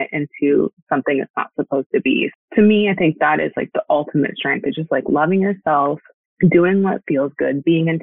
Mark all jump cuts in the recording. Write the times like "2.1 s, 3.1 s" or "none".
2.3 s

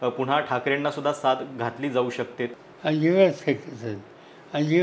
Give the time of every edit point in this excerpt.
2.5 s

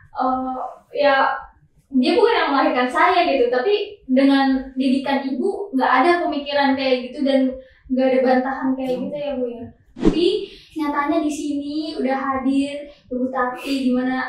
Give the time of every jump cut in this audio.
9.9 s

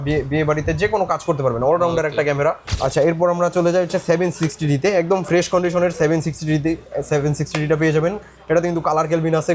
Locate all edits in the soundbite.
2.7 s

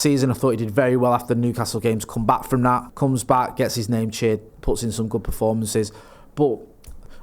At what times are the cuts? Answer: 2.9 s

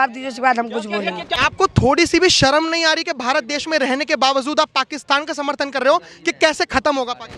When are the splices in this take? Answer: 1.4 s

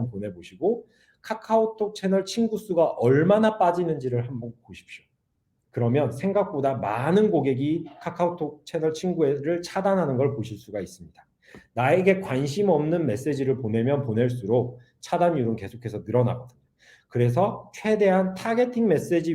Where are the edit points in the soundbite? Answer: none

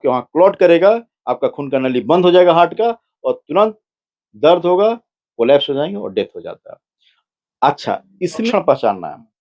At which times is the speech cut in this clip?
8.4 s

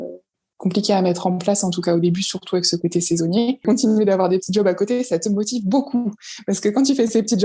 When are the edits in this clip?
3.6 s

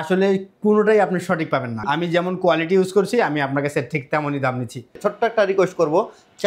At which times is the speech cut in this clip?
1.8 s, 5.0 s

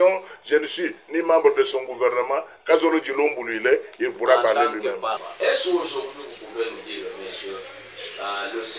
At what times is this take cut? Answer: none

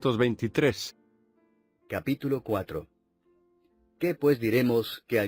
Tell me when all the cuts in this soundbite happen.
none

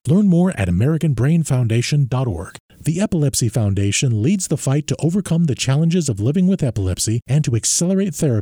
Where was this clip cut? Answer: 2.6 s

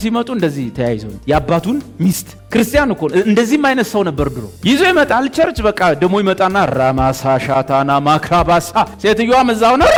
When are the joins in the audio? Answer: none

